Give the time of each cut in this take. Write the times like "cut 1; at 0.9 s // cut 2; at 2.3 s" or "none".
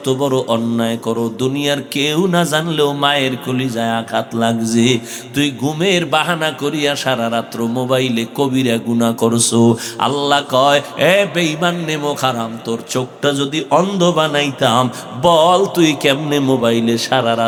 none